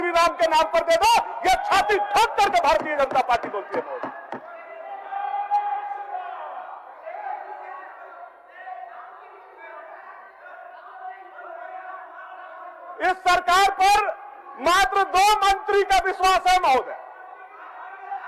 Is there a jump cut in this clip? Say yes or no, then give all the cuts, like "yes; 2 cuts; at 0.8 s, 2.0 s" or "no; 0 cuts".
no; 0 cuts